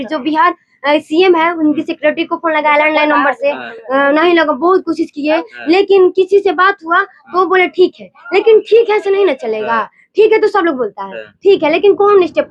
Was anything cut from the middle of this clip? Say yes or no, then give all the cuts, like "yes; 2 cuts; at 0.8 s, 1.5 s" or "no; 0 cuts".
no; 0 cuts